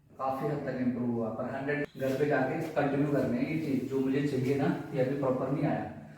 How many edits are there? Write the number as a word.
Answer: one